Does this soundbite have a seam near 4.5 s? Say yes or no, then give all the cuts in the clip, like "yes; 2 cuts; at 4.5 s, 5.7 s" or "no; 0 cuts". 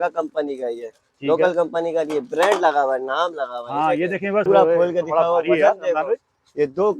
yes; 1 cut; at 4.5 s